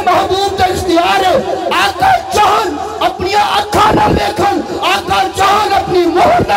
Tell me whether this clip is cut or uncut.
uncut